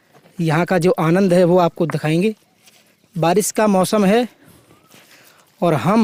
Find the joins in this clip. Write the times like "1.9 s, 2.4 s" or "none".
none